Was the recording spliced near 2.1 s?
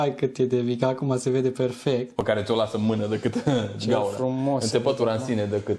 yes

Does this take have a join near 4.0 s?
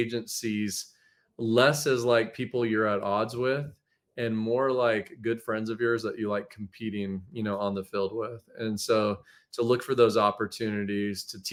no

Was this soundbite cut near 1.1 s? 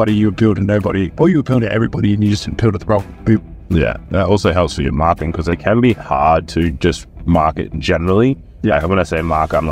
yes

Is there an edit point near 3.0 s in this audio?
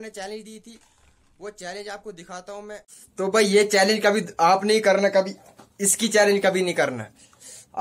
yes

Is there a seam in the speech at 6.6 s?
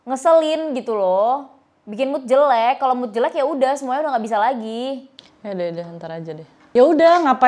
yes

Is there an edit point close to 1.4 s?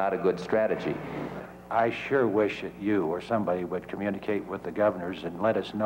yes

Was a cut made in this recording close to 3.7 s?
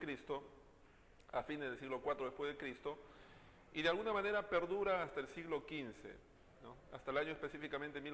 no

